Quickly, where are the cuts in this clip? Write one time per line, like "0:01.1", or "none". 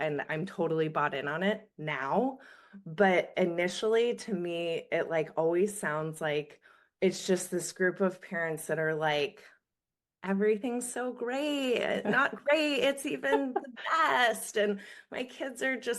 none